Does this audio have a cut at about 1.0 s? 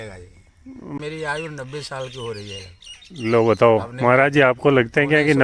yes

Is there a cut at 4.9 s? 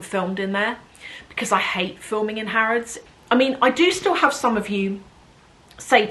no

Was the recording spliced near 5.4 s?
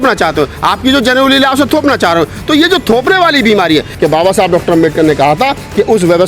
no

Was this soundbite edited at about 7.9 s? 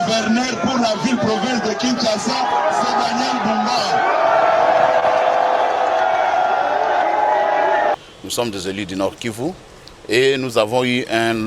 yes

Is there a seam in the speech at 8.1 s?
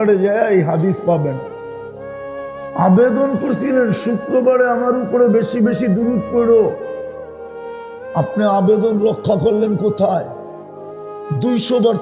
yes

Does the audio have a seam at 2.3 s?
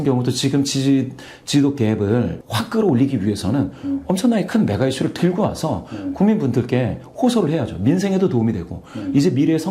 yes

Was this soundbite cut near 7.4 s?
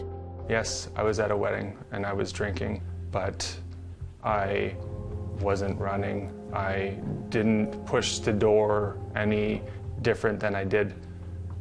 yes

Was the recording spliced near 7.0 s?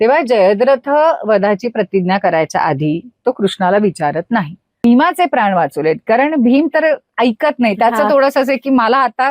no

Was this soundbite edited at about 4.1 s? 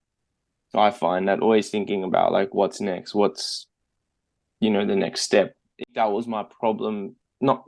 no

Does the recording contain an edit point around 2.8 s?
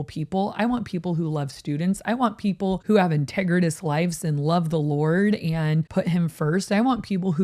yes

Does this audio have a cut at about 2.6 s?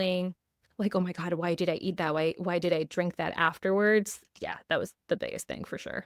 no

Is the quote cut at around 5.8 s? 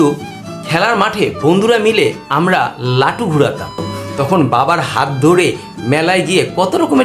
no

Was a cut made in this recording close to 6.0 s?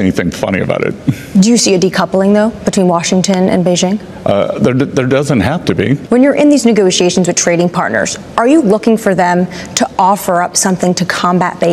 yes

